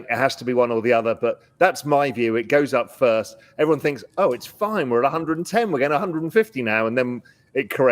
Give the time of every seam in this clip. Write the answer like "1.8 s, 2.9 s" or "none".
none